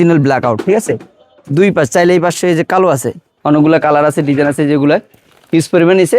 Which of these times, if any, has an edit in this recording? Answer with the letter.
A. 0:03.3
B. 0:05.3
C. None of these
A